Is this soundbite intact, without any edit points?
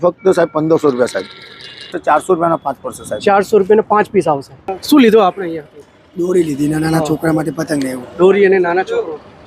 no; 2 cuts; at 1.9 s, 4.7 s

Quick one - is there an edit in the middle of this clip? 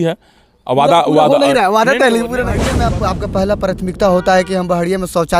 yes; 1 cut; at 2.8 s

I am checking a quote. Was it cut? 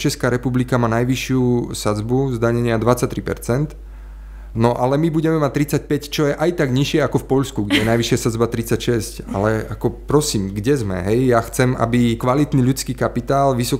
yes; 1 cut; at 12.2 s

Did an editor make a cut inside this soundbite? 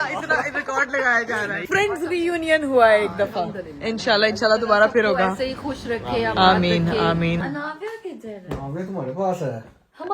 yes; 2 cuts; at 1.7 s, 7.4 s

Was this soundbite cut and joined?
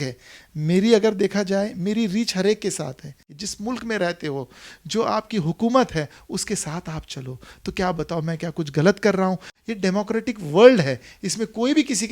yes; 2 cuts; at 3.4 s, 9.5 s

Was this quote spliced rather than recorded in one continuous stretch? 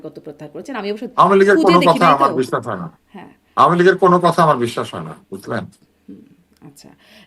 no; 0 cuts

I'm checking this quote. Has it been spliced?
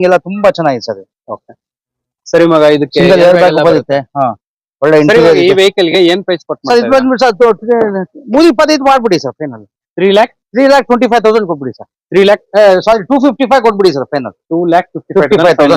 yes; 1 cut; at 12.4 s

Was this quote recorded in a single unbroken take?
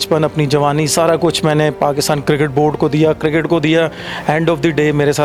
yes; 0 cuts

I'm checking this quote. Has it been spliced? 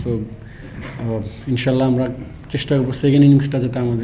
no; 0 cuts

